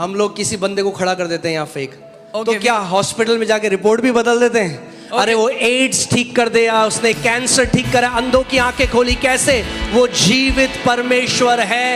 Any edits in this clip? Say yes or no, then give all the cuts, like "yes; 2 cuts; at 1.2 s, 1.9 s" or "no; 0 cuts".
no; 0 cuts